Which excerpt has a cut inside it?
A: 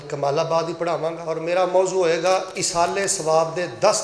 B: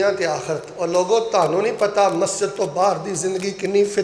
A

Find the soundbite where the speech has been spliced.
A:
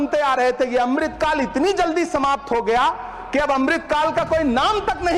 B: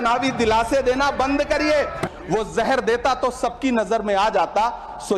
B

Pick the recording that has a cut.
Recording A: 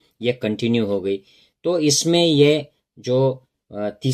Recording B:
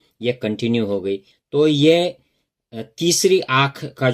B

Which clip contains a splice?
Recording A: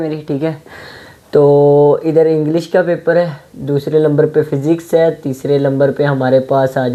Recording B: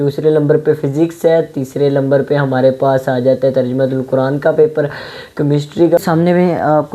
B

